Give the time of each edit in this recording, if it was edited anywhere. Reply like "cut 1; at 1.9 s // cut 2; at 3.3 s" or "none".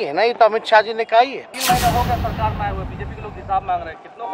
cut 1; at 1.5 s